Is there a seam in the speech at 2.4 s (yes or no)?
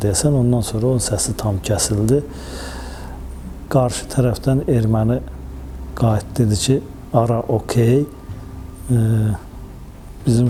no